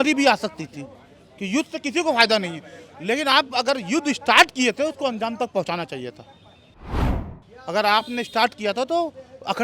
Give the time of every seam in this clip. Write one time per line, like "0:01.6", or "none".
0:07.1

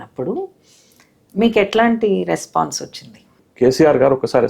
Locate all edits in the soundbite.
none

